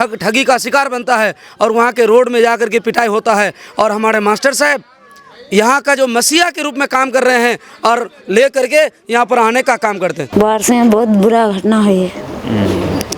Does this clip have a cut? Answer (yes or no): yes